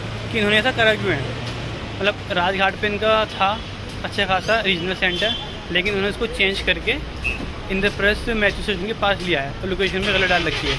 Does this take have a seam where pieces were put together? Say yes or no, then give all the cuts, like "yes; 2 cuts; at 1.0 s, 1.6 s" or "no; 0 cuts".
no; 0 cuts